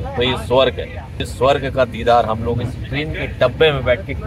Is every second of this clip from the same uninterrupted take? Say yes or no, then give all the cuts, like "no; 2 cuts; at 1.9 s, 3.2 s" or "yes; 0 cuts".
no; 1 cut; at 1.2 s